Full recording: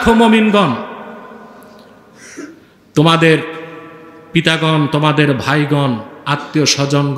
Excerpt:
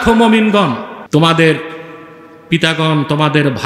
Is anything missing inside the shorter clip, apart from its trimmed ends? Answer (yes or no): yes